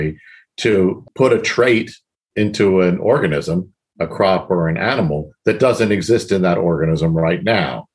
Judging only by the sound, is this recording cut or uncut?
cut